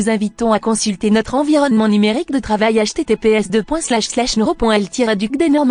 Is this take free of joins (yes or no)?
yes